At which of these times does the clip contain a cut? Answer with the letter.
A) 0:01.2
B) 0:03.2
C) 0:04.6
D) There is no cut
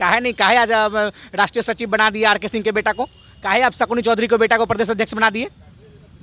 D